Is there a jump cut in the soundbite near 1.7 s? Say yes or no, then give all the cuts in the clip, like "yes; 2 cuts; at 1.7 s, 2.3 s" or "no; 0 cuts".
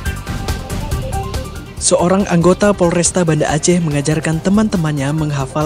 yes; 1 cut; at 1.7 s